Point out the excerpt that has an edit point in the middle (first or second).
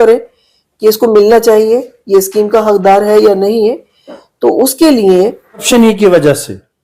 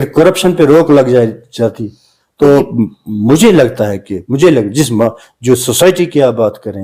first